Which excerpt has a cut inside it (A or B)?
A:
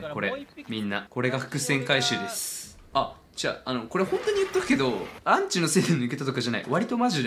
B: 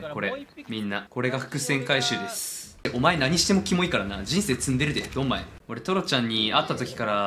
B